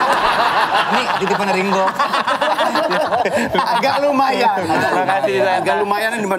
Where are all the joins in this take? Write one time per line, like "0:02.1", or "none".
none